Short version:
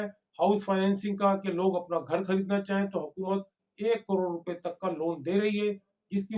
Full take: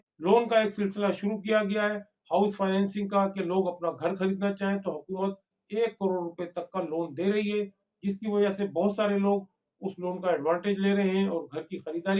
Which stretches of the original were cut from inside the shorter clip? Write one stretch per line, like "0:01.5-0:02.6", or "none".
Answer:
none